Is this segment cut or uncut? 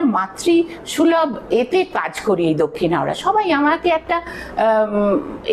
uncut